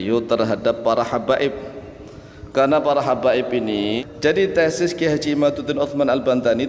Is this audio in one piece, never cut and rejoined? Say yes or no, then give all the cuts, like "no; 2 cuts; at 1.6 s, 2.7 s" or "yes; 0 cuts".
no; 1 cut; at 4.1 s